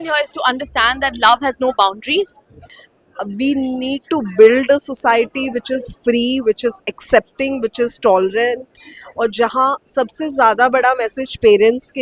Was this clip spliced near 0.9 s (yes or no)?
no